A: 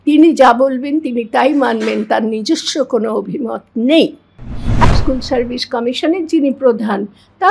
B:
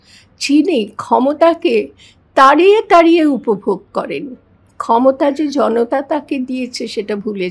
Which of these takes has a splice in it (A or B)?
A